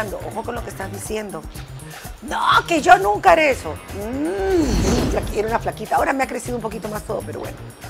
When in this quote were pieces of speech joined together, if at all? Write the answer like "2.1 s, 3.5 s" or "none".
4.8 s